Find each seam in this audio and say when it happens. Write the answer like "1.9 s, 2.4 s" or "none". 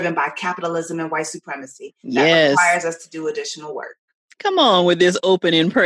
none